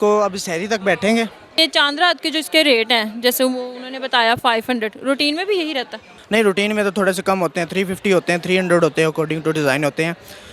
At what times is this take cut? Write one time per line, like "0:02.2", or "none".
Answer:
0:01.5